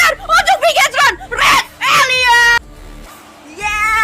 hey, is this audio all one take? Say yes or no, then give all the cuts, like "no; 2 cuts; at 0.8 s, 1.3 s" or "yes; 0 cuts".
no; 1 cut; at 2.6 s